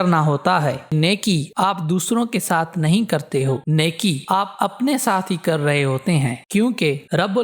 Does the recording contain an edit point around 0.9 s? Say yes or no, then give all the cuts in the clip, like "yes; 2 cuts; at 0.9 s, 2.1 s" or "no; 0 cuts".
yes; 1 cut; at 0.9 s